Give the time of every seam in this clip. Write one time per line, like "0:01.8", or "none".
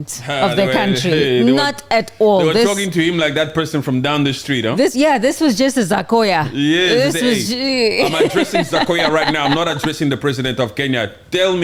none